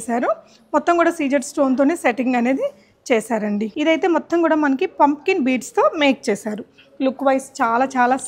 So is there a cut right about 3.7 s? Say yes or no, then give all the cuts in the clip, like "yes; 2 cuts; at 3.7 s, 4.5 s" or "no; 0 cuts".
yes; 1 cut; at 3.7 s